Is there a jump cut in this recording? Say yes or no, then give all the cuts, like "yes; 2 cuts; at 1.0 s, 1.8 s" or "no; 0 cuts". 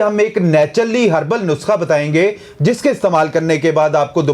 no; 0 cuts